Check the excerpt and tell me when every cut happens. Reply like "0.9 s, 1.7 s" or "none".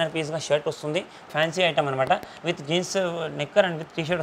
1.3 s